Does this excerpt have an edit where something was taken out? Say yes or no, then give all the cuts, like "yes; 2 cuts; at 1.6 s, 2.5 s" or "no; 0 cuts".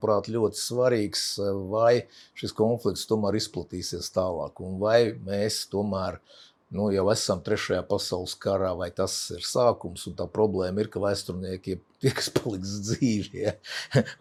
no; 0 cuts